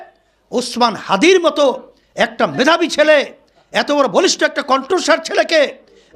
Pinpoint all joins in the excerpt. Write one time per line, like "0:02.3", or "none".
none